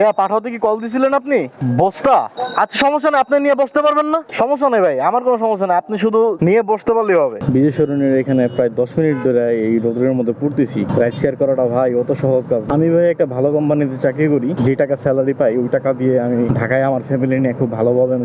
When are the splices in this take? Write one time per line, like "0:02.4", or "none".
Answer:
0:01.5
0:02.4
0:04.3
0:07.4
0:10.9
0:12.6
0:14.6
0:16.5